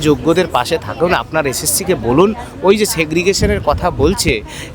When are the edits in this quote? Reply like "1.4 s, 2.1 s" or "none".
none